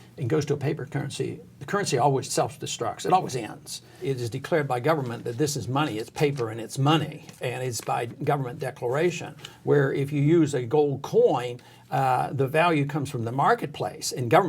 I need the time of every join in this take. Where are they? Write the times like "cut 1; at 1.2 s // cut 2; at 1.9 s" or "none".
cut 1; at 2.3 s // cut 2; at 4.0 s